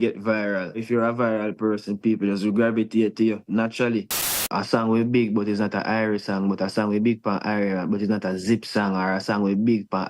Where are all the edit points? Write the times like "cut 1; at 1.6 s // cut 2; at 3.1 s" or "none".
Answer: cut 1; at 0.8 s // cut 2; at 4.4 s